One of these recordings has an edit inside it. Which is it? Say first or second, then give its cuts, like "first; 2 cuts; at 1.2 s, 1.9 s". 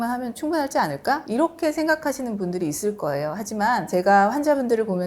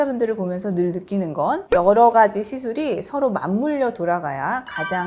second; 1 cut; at 1.6 s